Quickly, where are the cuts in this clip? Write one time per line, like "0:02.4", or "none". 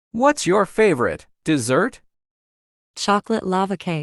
none